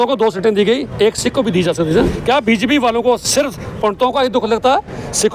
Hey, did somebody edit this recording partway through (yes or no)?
yes